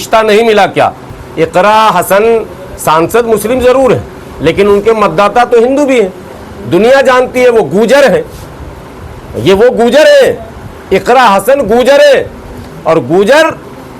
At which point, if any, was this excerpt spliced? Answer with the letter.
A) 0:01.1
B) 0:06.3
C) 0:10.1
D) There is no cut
A